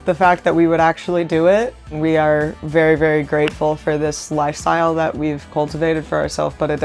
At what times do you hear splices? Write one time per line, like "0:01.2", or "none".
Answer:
0:01.9